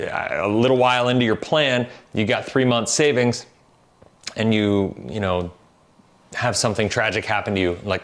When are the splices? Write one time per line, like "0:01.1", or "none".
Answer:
none